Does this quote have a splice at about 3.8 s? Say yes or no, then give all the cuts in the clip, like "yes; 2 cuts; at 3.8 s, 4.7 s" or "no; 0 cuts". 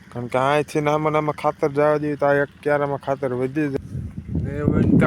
yes; 1 cut; at 3.8 s